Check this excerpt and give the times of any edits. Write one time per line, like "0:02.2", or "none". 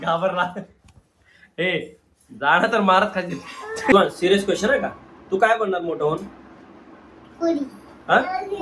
0:03.9